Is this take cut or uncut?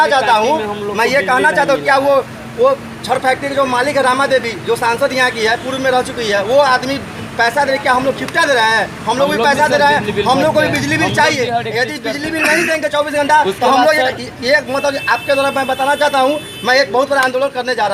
uncut